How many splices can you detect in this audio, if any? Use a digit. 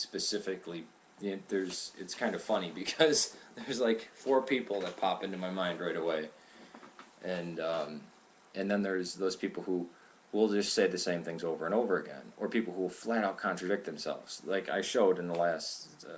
0